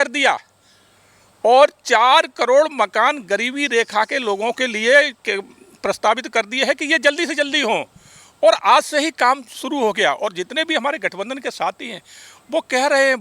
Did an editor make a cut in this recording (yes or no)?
no